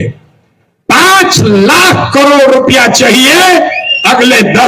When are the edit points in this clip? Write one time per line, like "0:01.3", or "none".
none